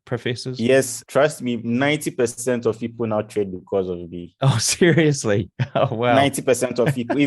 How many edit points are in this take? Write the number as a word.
one